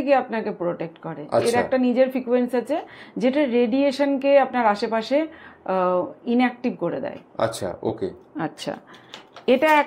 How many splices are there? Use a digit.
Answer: 0